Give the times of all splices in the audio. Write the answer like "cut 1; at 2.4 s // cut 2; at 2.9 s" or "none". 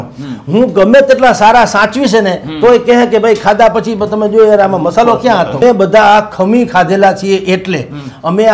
cut 1; at 5.6 s